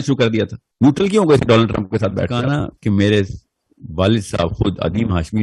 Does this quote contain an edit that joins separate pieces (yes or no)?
yes